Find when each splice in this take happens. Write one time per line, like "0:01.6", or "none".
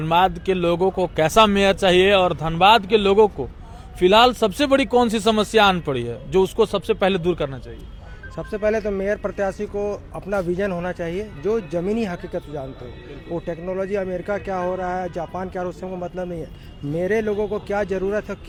none